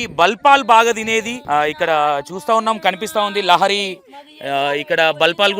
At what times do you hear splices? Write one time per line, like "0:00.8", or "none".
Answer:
0:01.4